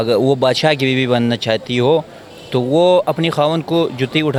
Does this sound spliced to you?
no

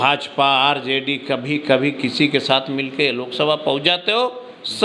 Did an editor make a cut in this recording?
no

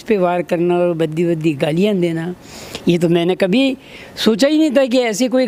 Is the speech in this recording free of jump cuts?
yes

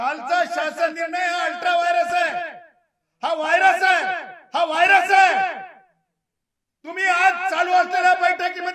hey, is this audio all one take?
yes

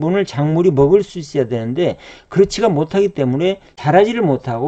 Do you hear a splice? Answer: yes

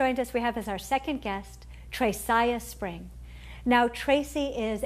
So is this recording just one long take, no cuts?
no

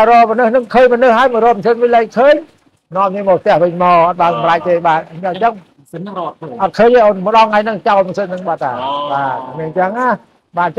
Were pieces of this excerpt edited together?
no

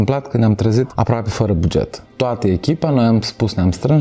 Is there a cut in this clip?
yes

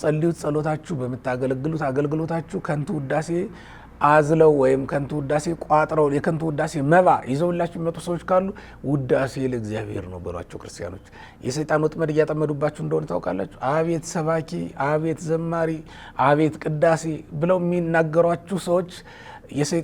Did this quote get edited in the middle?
no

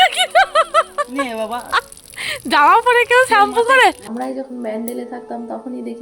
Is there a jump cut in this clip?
yes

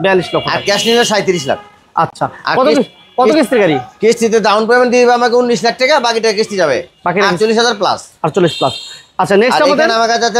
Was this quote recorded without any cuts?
yes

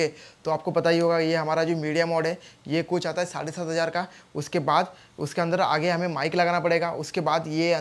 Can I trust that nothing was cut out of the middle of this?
yes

